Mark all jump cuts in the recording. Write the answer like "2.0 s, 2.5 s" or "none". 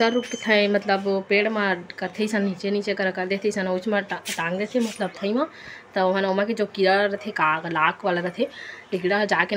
none